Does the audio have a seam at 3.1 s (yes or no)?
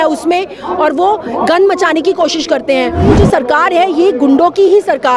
yes